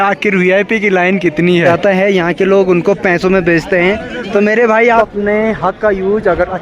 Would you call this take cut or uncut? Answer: cut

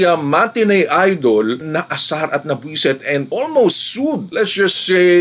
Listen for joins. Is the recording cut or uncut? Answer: uncut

